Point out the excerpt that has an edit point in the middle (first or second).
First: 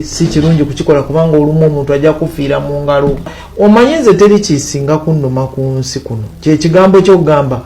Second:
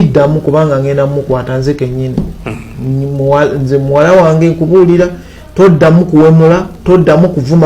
first